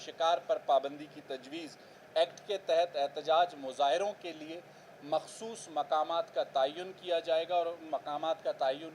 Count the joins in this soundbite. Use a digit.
1